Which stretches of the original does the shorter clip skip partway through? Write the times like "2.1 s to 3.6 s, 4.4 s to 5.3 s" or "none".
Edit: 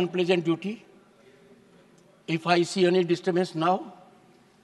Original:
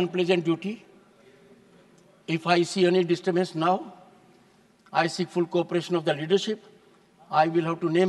none